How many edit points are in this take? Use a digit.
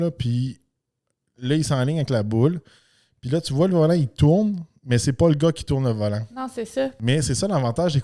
1